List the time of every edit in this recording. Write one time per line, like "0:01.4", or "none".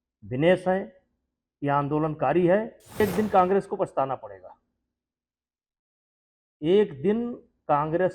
0:03.0